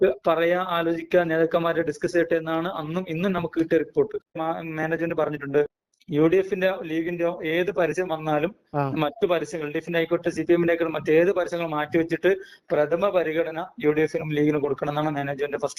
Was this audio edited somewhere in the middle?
yes; 1 cut; at 4.4 s

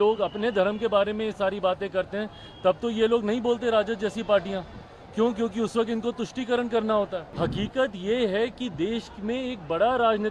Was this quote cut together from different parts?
yes; 1 cut; at 7.3 s

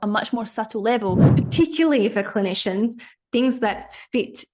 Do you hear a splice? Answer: yes; 1 cut; at 1.2 s

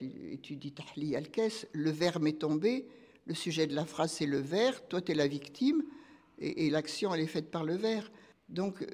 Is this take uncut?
yes; 0 cuts

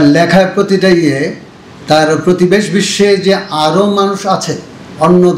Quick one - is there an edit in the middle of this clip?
no; 0 cuts

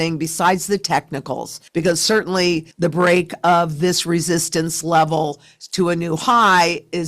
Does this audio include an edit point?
yes; 2 cuts; at 1.5 s, 2.7 s

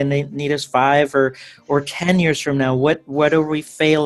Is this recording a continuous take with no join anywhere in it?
yes; 0 cuts

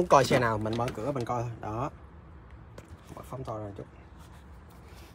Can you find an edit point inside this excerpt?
no; 0 cuts

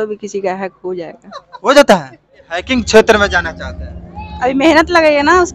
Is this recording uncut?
no; 1 cut; at 2.7 s

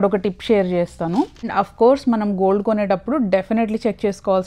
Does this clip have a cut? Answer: yes; 1 cut; at 1.4 s

